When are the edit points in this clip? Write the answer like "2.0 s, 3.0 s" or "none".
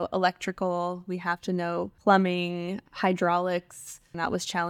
1.9 s